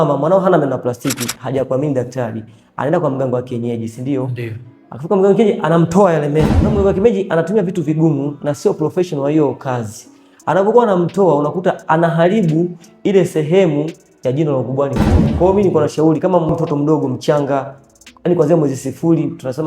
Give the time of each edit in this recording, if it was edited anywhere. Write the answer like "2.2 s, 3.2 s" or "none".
6.6 s, 15.2 s, 16.5 s